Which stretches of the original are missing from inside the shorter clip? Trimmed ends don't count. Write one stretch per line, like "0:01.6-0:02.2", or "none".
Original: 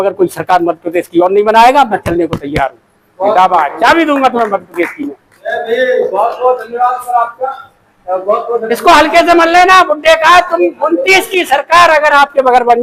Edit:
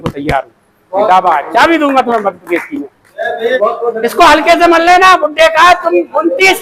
0:05.9-0:08.3